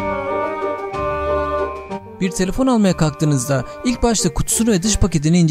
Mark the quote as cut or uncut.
cut